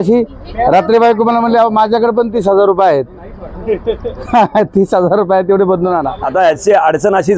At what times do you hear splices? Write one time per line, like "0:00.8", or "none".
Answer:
0:06.2

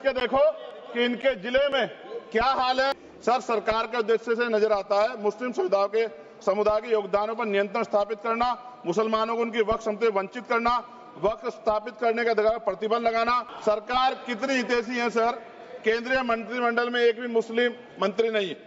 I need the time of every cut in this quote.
0:03.0
0:13.5

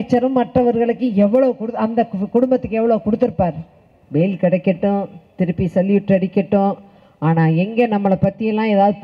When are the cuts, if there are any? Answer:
0:03.9

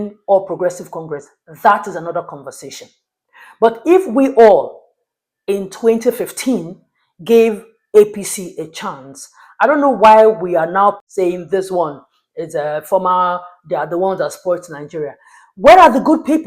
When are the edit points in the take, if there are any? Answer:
0:11.0

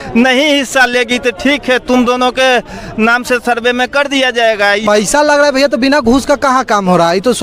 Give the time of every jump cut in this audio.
0:04.8

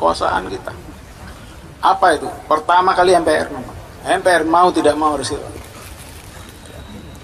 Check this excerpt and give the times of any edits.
none

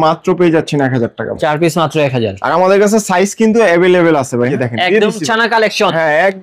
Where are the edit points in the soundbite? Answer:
0:04.5

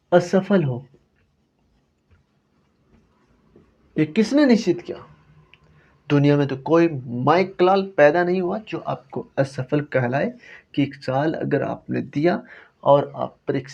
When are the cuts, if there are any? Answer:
none

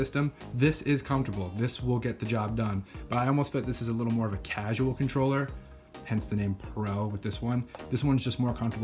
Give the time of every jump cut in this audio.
none

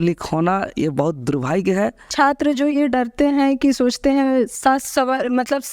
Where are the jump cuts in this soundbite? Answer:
0:02.1

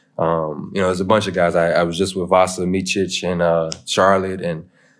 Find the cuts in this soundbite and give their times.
none

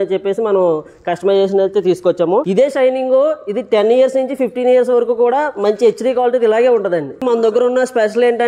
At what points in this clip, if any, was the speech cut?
0:02.5
0:07.2

